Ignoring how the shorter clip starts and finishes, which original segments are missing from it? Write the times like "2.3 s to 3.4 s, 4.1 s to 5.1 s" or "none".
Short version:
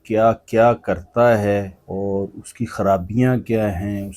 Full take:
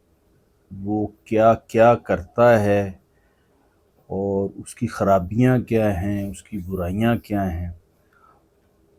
3.0 s to 4.0 s